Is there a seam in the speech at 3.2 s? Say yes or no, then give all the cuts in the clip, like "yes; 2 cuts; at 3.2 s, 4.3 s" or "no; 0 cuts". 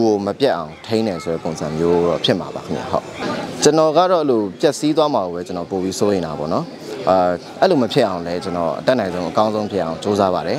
yes; 1 cut; at 3.2 s